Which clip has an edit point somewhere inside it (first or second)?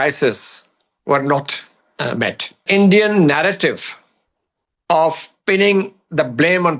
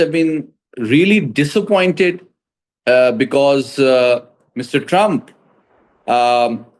first